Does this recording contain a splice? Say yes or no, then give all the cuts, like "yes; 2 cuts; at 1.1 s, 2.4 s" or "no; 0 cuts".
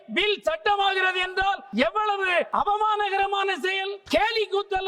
yes; 3 cuts; at 1.6 s, 2.5 s, 3.9 s